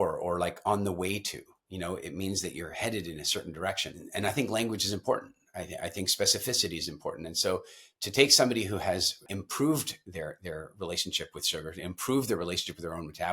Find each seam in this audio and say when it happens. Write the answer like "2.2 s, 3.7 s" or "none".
4.0 s, 9.3 s